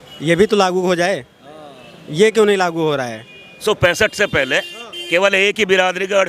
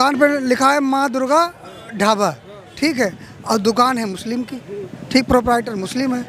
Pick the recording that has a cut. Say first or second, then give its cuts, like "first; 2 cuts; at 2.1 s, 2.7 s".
first; 1 cut; at 3.6 s